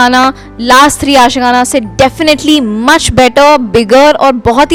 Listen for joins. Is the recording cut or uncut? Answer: uncut